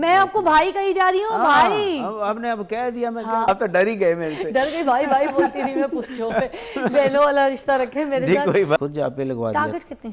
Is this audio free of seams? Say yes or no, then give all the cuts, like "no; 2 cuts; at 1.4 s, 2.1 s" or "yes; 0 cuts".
no; 2 cuts; at 3.4 s, 8.8 s